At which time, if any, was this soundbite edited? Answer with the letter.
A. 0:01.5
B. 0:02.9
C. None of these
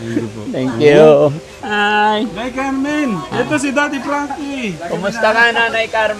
A